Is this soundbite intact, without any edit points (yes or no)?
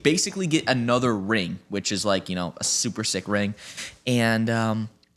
yes